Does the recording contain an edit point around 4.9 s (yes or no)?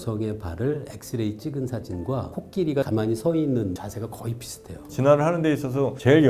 yes